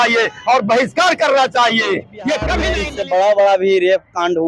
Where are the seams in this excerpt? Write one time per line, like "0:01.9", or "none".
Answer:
0:02.8